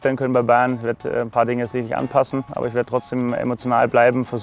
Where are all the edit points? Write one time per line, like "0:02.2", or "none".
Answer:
0:02.5